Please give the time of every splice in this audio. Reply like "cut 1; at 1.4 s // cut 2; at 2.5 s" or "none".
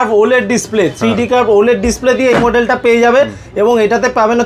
none